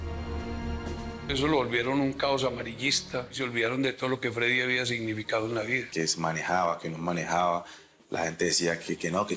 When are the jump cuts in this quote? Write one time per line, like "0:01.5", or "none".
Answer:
0:01.2
0:03.4
0:05.8